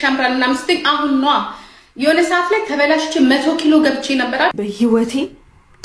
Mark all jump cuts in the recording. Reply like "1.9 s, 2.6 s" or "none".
4.5 s